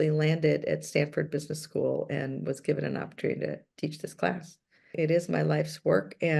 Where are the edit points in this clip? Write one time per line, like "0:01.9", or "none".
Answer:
0:04.9